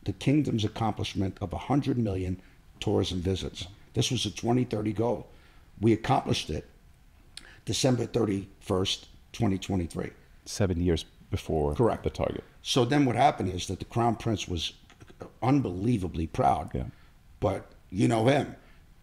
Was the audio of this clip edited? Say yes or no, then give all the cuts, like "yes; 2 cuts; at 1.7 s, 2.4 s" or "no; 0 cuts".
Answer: no; 0 cuts